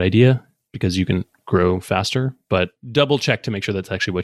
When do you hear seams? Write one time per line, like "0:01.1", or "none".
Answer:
0:02.8